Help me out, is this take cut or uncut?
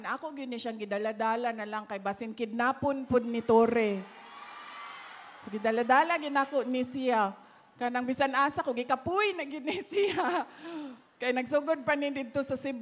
uncut